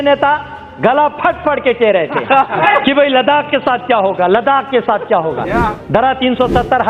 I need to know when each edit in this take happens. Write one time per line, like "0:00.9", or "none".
0:02.6
0:05.7